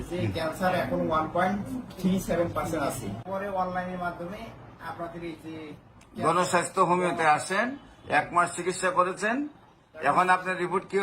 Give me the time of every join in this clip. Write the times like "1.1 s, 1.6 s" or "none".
3.3 s